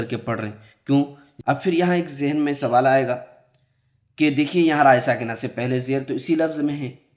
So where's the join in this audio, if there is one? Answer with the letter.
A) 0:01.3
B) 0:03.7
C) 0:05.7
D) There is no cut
A